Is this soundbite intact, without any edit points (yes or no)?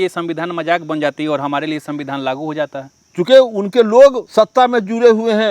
no